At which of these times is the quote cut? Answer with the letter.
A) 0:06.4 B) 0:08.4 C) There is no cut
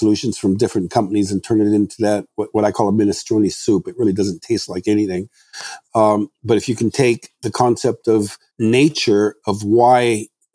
B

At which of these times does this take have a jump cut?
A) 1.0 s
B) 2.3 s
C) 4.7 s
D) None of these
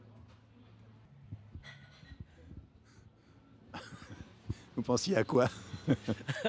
A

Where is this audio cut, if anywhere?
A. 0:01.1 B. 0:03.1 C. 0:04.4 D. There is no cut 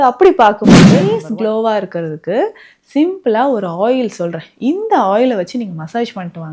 A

